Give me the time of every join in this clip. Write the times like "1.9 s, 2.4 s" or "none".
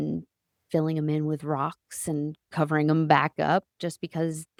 none